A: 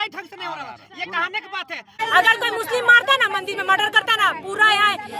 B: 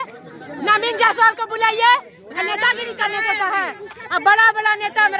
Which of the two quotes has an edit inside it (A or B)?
A